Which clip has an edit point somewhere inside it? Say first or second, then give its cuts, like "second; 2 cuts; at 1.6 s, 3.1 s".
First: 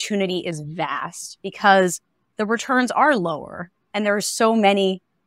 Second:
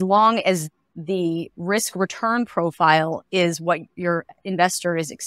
second; 2 cuts; at 0.9 s, 3.9 s